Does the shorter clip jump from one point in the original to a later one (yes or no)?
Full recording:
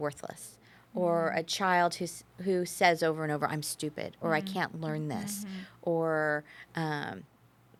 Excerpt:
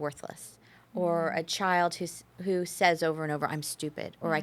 no